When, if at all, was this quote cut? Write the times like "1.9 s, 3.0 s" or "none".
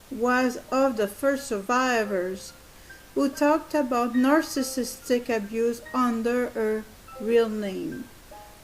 1.9 s